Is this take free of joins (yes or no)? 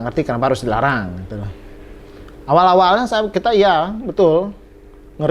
yes